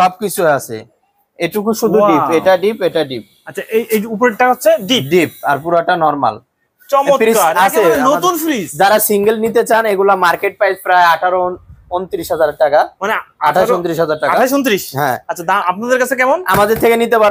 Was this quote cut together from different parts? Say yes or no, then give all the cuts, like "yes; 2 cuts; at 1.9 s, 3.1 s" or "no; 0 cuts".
no; 0 cuts